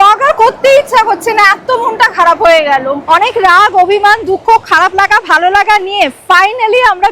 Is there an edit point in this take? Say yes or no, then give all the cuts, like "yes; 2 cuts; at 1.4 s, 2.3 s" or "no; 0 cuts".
yes; 1 cut; at 3.0 s